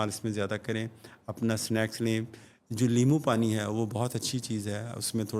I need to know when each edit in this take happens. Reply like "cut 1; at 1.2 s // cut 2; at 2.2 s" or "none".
none